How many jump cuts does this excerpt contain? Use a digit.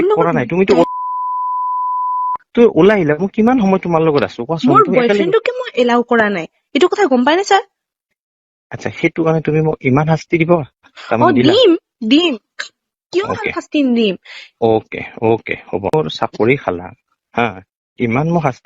1